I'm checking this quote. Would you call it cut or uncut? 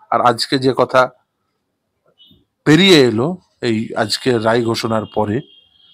uncut